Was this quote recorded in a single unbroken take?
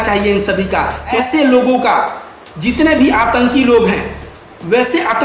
no; 1 cut; at 1.2 s

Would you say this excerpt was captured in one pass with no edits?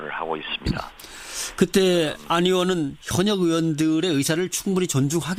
yes; 0 cuts

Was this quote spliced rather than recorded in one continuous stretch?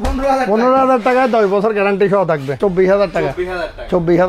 yes; 1 cut; at 2.6 s

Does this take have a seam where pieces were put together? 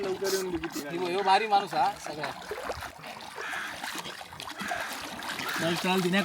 yes; 1 cut; at 2.9 s

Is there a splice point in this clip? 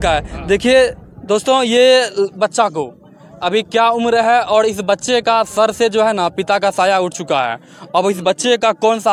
no; 0 cuts

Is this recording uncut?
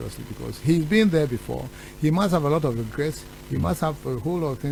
yes; 0 cuts

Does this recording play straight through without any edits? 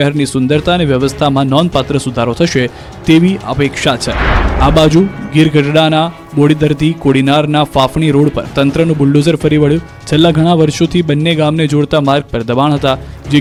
yes; 0 cuts

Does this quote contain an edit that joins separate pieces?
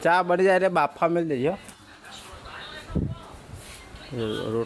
no; 0 cuts

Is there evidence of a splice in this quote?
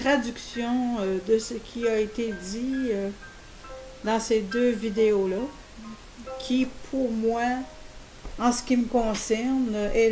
yes; 1 cut; at 4.6 s

